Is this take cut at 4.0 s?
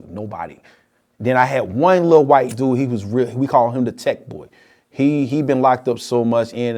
no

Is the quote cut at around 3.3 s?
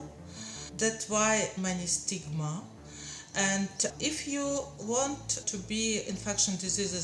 no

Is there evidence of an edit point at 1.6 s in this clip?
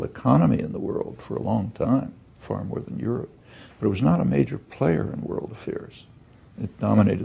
no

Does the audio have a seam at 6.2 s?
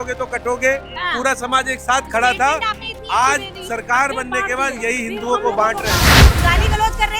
yes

